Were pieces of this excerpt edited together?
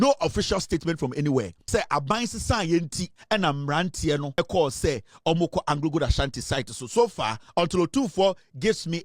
yes; 3 cuts; at 1.6 s, 3.1 s, 4.4 s

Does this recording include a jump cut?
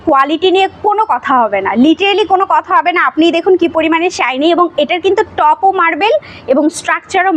no; 0 cuts

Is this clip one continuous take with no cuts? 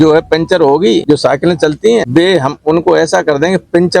no; 2 cuts; at 1.0 s, 2.1 s

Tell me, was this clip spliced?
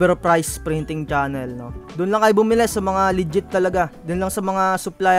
no; 0 cuts

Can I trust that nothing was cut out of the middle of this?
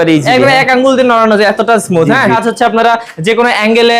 no; 1 cut; at 2.4 s

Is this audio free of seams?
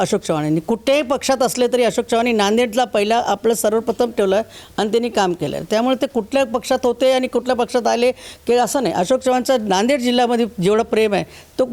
yes; 0 cuts

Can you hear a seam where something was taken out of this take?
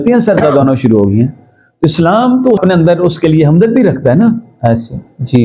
yes; 1 cut; at 2.6 s

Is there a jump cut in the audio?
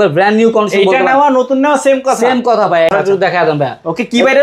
yes; 1 cut; at 2.9 s

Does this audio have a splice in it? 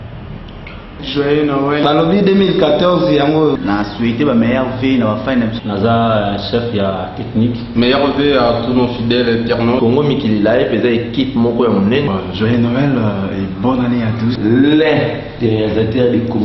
yes; 1 cut; at 0.9 s

